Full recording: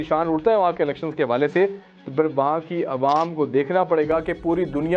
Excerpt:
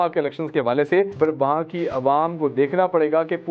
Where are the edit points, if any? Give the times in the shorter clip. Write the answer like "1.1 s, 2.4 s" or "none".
1.1 s